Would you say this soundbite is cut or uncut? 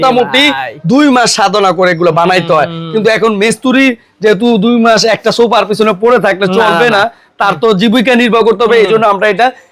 uncut